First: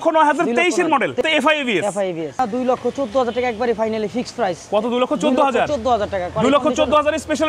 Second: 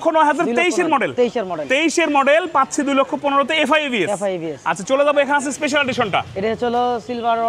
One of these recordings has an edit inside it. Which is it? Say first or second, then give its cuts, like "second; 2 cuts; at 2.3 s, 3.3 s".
first; 2 cuts; at 1.2 s, 2.4 s